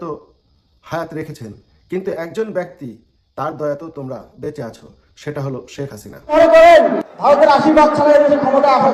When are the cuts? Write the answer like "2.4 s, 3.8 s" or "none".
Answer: 6.3 s